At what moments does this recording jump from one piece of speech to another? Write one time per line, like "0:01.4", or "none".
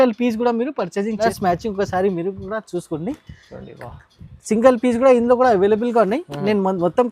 0:01.2

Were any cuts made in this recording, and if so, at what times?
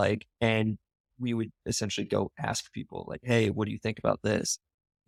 none

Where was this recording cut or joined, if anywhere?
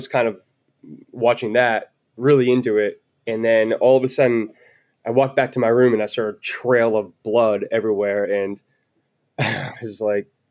none

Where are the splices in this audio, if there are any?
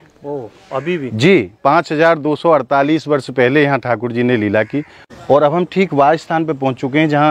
0:05.0

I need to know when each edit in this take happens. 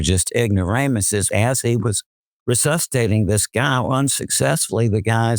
0:01.3

